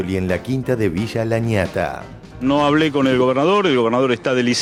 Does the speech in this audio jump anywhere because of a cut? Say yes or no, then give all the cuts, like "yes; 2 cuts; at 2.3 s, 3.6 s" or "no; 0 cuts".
no; 0 cuts